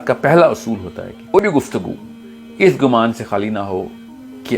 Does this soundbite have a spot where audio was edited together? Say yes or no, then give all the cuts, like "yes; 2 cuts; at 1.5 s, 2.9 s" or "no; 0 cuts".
yes; 1 cut; at 1.4 s